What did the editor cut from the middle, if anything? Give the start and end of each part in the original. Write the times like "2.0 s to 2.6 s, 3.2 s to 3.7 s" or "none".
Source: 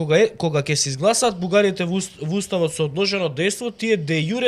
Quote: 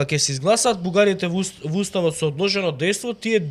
none